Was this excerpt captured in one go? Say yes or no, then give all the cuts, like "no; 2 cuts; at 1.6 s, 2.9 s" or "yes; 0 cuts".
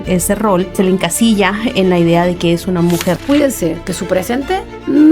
no; 2 cuts; at 0.7 s, 3.2 s